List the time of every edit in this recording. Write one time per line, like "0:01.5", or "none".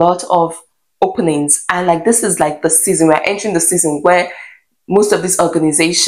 none